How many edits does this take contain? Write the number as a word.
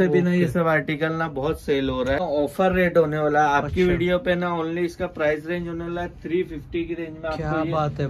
one